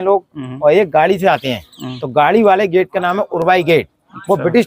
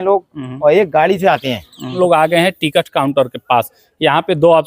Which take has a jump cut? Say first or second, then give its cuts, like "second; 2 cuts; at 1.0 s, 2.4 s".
second; 1 cut; at 1.9 s